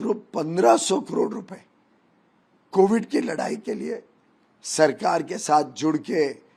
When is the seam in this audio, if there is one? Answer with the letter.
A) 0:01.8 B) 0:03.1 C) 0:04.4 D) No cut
D